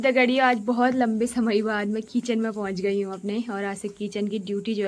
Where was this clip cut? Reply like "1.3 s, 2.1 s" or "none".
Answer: none